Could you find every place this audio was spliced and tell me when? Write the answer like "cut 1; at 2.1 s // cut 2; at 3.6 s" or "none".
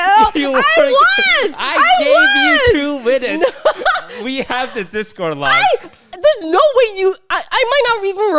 none